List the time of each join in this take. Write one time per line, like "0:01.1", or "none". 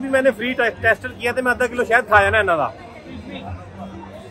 none